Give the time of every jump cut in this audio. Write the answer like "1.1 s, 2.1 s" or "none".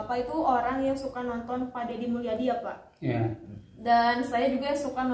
none